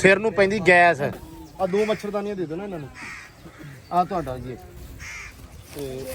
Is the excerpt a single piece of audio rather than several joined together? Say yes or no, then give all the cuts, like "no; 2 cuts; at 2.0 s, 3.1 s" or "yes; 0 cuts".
no; 1 cut; at 1.1 s